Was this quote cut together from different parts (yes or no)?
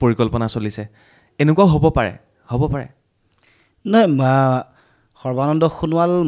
no